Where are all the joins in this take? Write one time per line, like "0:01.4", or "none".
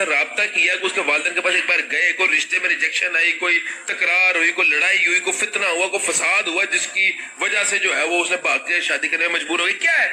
none